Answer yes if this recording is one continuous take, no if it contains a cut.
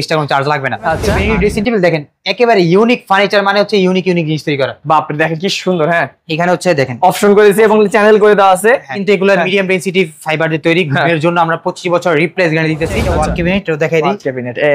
no